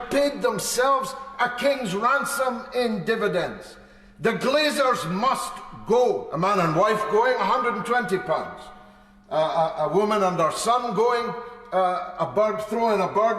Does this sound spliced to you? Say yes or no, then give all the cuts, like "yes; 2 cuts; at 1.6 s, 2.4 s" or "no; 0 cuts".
yes; 1 cut; at 6.3 s